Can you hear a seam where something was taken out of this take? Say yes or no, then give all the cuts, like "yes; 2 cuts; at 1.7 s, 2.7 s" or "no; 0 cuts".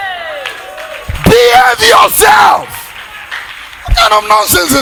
no; 0 cuts